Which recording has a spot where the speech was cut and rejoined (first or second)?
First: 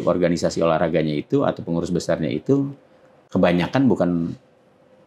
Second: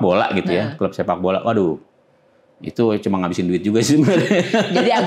first